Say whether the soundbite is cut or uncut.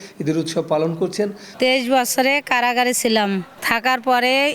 cut